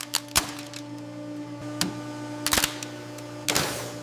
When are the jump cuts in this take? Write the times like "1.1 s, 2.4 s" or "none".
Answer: none